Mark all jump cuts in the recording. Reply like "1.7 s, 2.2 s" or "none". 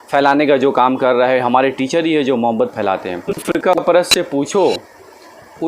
3.8 s